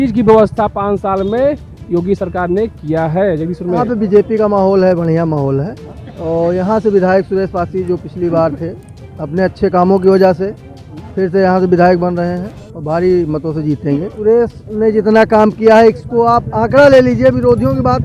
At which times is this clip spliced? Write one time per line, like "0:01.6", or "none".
0:03.8
0:14.1